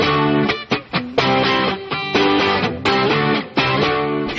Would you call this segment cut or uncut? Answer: uncut